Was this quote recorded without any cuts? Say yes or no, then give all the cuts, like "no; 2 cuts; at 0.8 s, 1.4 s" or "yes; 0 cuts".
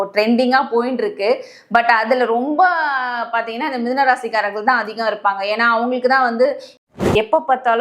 no; 1 cut; at 6.8 s